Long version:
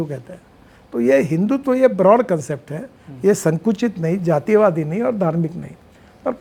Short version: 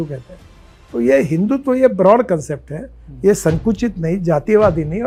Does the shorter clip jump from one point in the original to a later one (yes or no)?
no